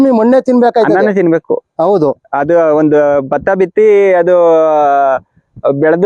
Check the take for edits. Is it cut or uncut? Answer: uncut